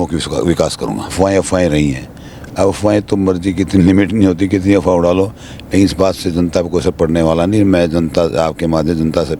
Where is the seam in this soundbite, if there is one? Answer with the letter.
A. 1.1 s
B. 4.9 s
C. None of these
A